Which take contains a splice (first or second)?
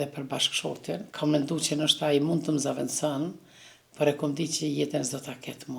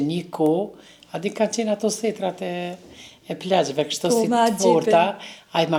first